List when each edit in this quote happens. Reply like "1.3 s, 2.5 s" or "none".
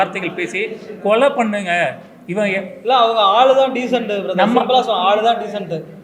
none